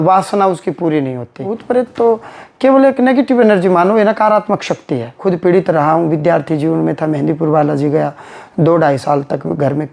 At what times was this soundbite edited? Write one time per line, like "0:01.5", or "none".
0:01.6
0:05.2